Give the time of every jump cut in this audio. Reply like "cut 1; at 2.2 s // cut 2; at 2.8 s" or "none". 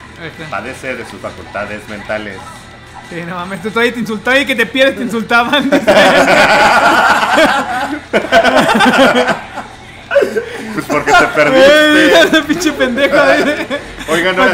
none